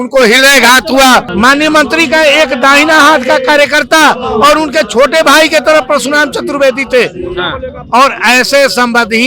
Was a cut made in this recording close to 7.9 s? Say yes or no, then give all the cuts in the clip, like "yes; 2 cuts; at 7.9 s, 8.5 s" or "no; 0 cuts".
no; 1 cut; at 1.3 s